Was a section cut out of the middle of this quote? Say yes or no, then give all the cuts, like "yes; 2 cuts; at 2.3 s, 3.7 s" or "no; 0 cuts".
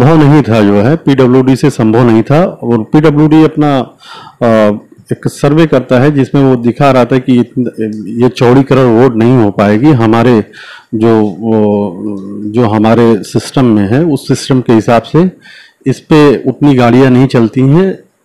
no; 0 cuts